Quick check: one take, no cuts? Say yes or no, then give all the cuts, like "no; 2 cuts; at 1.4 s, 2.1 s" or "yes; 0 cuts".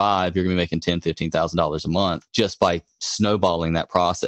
no; 1 cut; at 2.2 s